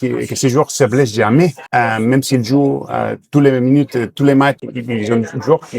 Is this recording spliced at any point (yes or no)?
yes